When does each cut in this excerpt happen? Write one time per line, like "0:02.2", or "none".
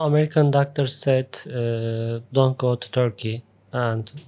none